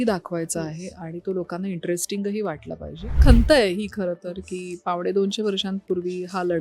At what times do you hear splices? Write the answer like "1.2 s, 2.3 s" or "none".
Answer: 3.2 s

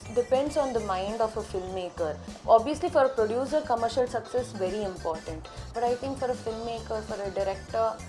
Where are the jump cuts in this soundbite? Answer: 2.3 s

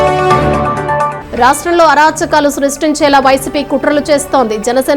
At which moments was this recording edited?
1.2 s

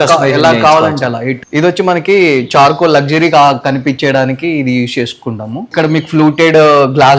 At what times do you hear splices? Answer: 1.3 s, 5.6 s

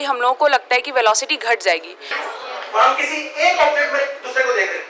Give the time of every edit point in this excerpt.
2.1 s

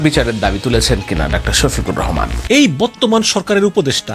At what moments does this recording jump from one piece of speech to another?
2.3 s

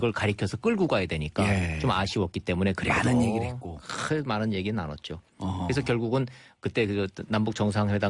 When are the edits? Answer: none

